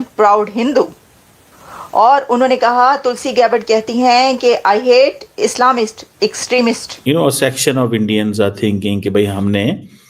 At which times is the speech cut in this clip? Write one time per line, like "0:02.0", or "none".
0:06.9